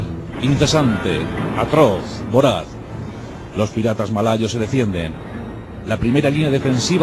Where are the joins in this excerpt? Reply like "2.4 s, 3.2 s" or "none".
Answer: 2.0 s